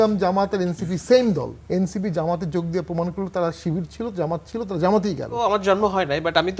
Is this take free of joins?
no; 2 cuts; at 1.5 s, 5.4 s

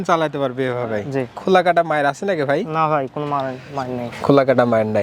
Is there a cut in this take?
yes; 1 cut; at 1.4 s

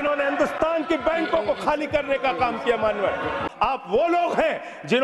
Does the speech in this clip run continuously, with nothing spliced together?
no; 1 cut; at 3.4 s

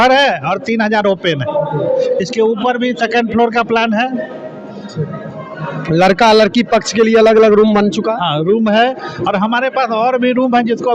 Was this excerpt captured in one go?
yes; 0 cuts

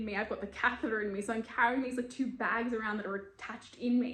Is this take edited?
no; 0 cuts

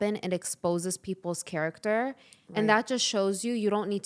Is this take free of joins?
yes; 0 cuts

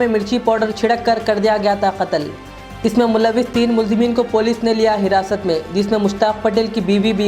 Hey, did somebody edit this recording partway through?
no; 0 cuts

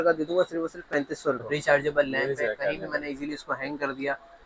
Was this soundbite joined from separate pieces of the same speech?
yes; 1 cut; at 1.4 s

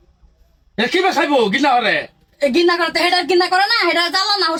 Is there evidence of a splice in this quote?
no; 0 cuts

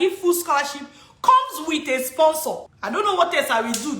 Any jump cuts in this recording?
yes; 1 cut; at 2.7 s

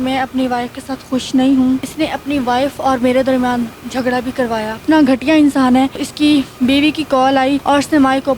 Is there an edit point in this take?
yes; 4 cuts; at 1.9 s, 4.8 s, 6.0 s, 7.6 s

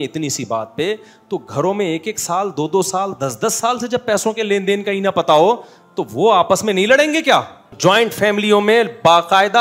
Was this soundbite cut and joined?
yes; 1 cut; at 7.6 s

